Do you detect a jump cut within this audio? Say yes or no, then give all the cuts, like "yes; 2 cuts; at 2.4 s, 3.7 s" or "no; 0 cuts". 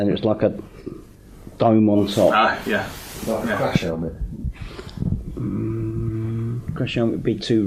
no; 0 cuts